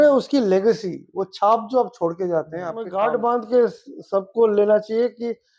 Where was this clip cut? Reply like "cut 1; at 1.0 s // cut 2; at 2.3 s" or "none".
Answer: cut 1; at 2.9 s